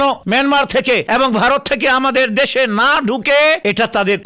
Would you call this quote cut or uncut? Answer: uncut